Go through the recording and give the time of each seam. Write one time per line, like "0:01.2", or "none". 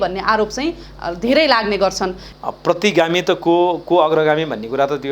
0:02.3